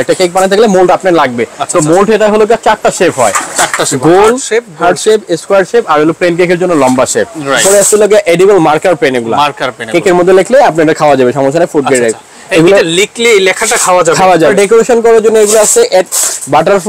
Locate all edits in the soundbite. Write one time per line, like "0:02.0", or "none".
0:07.6
0:14.5

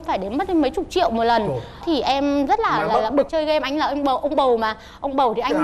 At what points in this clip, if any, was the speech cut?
0:03.3

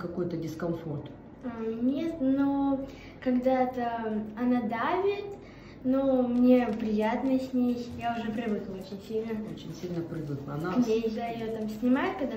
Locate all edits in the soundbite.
0:07.9
0:11.2

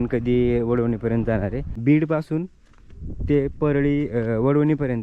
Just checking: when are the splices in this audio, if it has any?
0:01.7

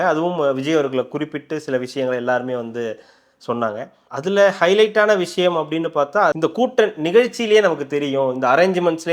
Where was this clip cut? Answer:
0:06.4

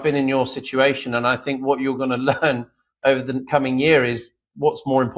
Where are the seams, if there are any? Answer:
none

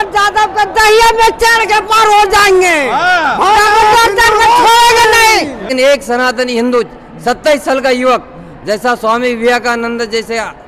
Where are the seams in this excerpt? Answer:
0:05.6

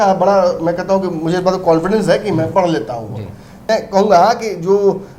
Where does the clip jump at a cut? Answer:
0:03.7

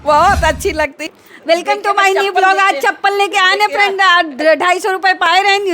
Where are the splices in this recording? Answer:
0:01.0

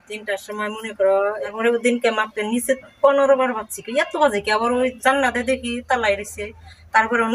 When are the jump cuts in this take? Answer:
0:01.5

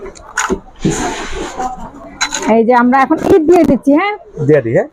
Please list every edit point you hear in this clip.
none

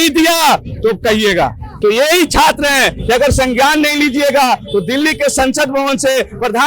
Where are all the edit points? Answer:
0:01.7

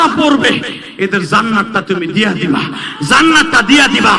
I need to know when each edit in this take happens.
none

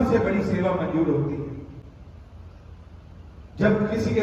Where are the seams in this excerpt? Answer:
none

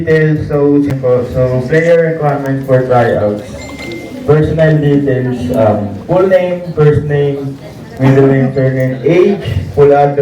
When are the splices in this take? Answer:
0:00.9

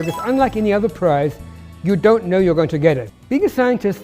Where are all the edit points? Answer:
0:03.1

